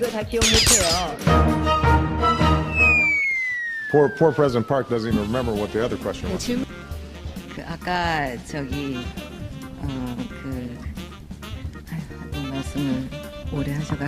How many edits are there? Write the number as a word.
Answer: zero